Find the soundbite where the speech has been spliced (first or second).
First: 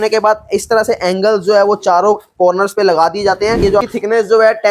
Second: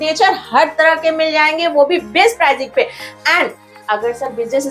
first